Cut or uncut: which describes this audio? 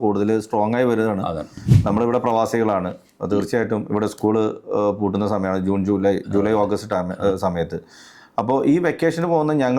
cut